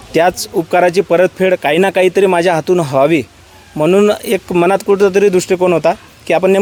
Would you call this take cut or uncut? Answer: uncut